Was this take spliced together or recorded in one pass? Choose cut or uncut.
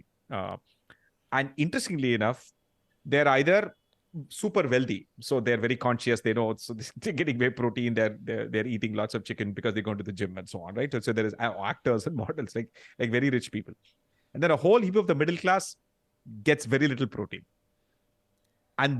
uncut